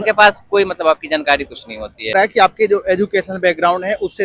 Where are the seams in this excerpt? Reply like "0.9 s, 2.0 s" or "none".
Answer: 2.1 s